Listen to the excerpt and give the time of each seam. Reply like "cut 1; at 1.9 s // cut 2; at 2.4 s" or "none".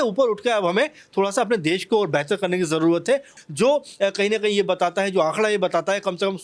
cut 1; at 3.3 s